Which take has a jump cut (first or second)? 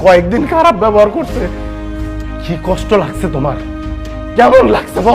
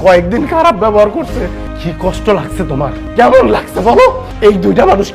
second